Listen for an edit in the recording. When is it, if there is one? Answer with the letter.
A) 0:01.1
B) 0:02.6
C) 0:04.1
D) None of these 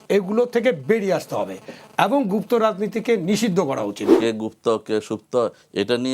C